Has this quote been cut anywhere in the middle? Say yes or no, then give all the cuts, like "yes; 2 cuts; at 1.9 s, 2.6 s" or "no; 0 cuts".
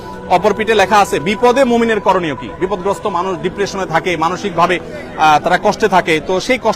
no; 0 cuts